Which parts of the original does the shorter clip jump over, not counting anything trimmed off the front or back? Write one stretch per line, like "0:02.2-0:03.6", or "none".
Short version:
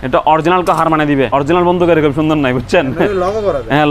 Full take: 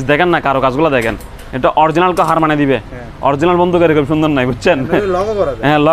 0:02.8-0:03.2